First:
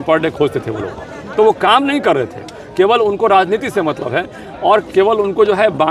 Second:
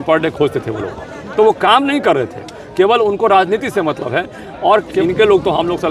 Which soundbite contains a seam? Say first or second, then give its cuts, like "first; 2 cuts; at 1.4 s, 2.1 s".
second; 1 cut; at 5.0 s